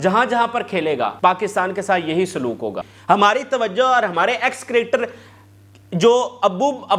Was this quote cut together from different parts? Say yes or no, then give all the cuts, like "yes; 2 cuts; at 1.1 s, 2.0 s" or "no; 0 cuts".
yes; 2 cuts; at 1.1 s, 2.9 s